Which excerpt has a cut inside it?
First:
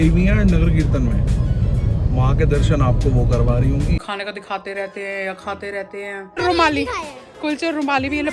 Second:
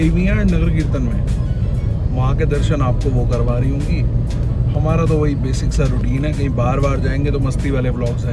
first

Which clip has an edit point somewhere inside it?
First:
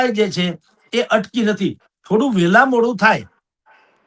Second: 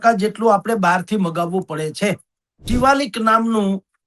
second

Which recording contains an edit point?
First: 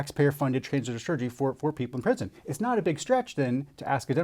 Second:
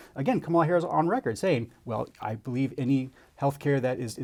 first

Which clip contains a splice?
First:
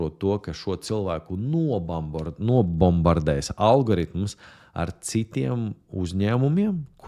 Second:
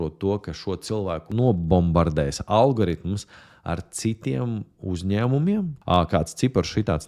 second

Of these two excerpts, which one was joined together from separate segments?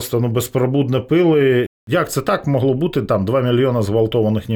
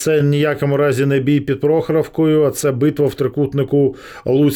first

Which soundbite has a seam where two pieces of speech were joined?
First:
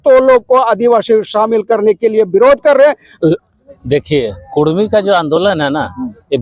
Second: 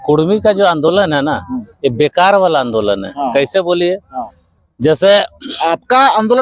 first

